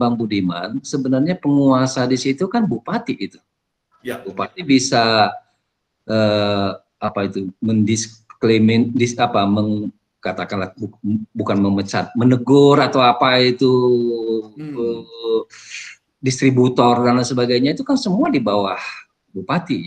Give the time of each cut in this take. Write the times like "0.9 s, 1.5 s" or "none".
none